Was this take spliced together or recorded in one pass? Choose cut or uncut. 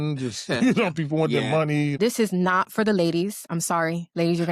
cut